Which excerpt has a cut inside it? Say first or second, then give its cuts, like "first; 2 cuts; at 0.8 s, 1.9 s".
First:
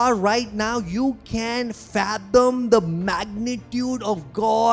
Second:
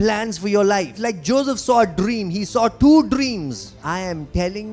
second; 2 cuts; at 0.9 s, 3.7 s